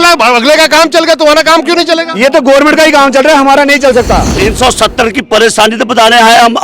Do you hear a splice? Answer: yes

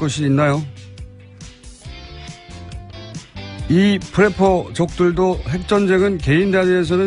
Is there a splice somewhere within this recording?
yes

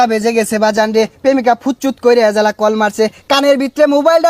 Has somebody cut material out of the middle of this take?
no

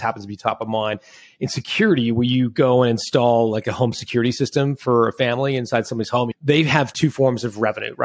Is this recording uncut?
no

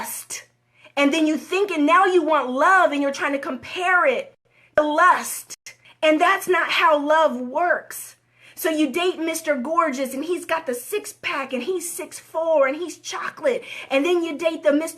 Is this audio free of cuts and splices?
no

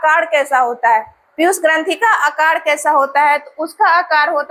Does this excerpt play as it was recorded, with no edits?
yes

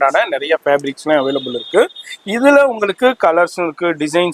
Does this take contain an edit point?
no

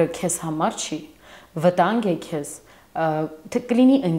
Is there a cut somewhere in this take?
no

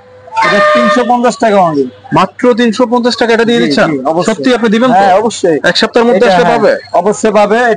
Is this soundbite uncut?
yes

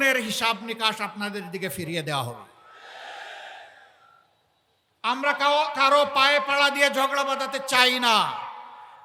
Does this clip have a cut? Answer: no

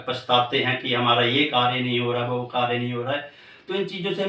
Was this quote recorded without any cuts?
yes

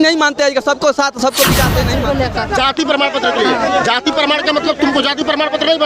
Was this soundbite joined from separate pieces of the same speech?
yes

